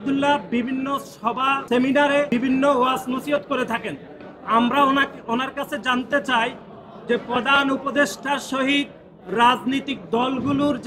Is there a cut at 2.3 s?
yes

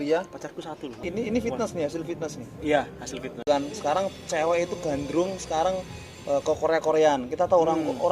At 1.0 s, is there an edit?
yes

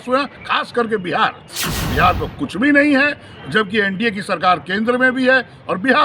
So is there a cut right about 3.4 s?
no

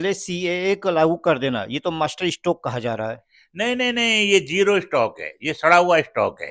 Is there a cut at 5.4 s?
no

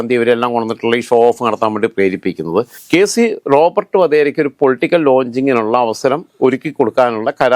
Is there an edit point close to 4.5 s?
no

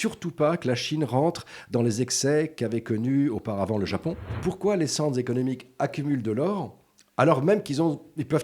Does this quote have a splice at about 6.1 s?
no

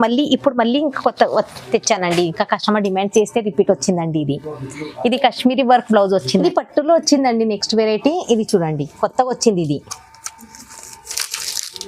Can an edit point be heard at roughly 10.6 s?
no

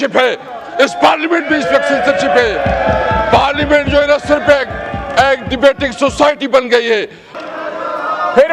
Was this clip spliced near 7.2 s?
yes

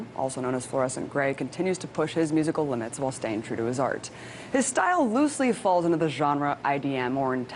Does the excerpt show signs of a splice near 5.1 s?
no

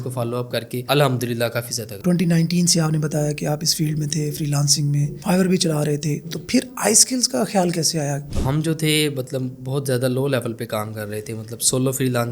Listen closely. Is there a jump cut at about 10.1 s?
no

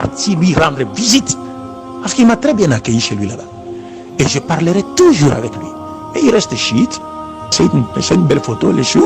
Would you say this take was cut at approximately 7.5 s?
yes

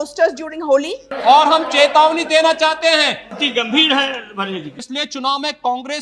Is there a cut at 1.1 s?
yes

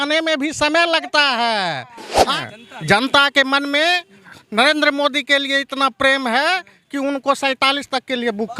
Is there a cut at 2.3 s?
yes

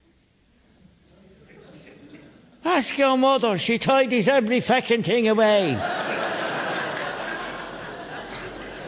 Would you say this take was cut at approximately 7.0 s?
no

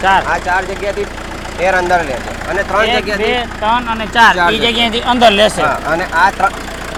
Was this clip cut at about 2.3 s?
no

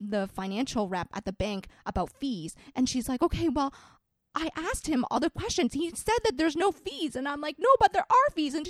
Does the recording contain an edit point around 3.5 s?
no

